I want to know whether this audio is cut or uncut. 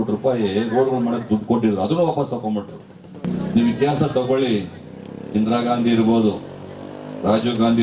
cut